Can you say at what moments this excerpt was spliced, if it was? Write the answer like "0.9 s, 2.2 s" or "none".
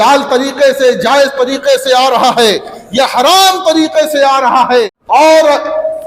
5.0 s